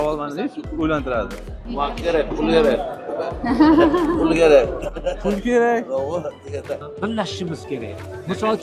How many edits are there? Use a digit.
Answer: 2